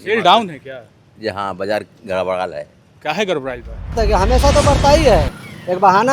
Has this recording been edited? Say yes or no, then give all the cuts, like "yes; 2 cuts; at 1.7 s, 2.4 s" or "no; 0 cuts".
yes; 1 cut; at 3.9 s